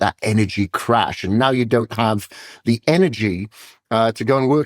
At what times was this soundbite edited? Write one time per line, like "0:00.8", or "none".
none